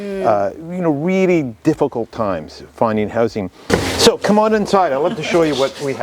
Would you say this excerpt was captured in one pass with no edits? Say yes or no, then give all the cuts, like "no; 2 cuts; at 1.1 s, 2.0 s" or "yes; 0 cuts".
no; 1 cut; at 3.6 s